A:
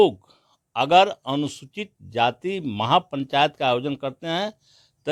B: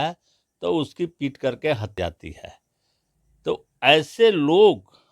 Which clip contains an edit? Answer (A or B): B